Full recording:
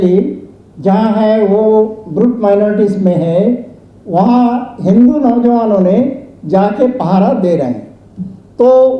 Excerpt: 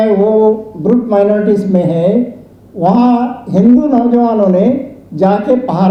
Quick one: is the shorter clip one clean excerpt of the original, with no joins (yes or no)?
yes